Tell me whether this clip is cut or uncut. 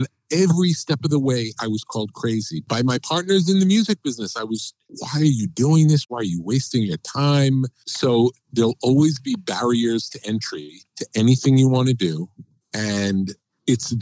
cut